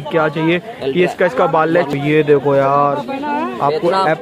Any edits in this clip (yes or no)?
yes